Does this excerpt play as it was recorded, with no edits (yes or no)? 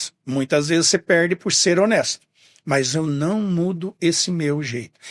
yes